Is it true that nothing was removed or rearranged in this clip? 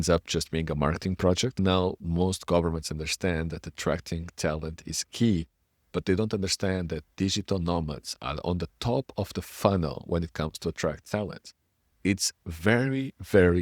no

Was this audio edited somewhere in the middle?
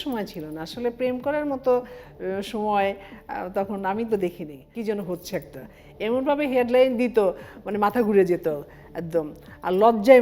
yes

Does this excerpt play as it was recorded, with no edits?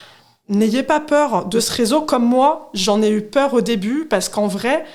yes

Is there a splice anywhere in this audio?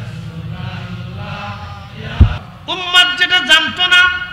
yes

